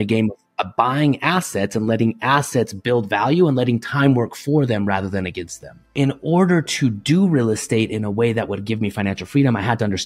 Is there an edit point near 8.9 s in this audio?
no; 1 cut; at 5.9 s

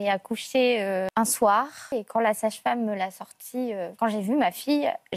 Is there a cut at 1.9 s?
yes; 3 cuts; at 1.1 s, 1.9 s, 3.9 s

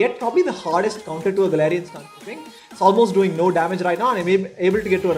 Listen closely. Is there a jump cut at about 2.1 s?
yes; 1 cut; at 2.1 s

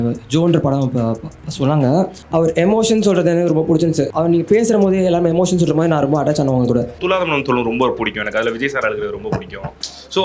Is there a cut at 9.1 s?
no; 3 cuts; at 2.2 s, 4.1 s, 6.9 s

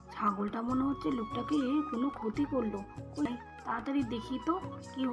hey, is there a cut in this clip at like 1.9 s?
no; 1 cut; at 3.2 s

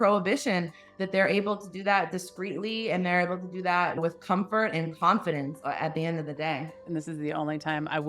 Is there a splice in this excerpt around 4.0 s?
yes; 2 cuts; at 4.0 s, 6.8 s

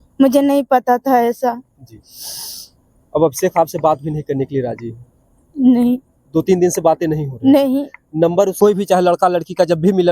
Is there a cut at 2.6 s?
no; 1 cut; at 8.5 s

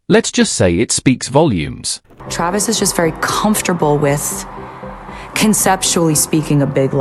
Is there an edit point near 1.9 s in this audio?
yes; 1 cut; at 1.9 s

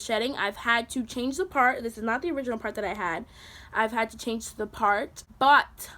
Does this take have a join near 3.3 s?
no; 0 cuts

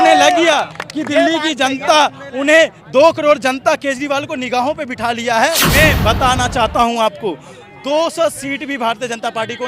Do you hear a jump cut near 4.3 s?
no; 1 cut; at 5.6 s

